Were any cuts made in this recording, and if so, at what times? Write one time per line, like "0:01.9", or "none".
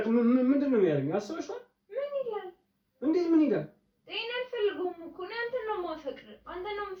none